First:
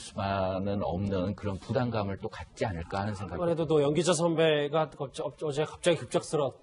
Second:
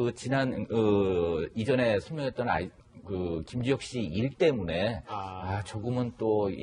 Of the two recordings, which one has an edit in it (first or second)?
first